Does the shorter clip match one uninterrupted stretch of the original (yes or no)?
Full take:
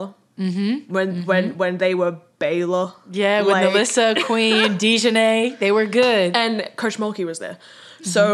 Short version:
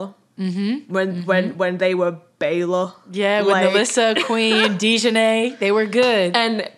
yes